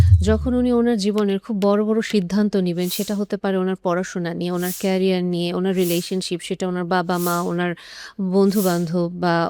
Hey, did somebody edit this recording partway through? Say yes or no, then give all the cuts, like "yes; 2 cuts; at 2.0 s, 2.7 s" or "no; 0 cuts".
no; 0 cuts